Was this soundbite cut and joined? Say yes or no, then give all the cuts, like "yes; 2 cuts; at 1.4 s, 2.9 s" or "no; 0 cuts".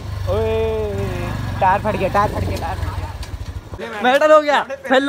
yes; 1 cut; at 3.8 s